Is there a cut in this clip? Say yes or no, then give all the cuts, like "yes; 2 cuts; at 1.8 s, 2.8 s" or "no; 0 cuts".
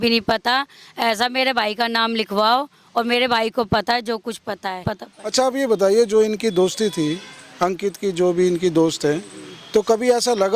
yes; 1 cut; at 5.0 s